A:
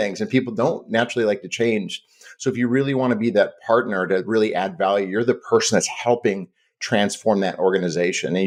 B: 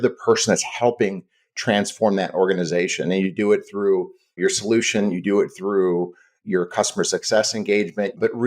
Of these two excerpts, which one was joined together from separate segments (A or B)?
B